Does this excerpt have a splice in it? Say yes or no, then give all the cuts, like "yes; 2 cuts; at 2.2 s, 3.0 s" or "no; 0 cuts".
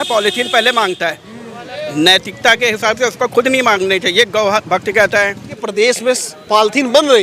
yes; 1 cut; at 5.5 s